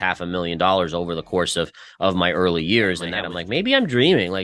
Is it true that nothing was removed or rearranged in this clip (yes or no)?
no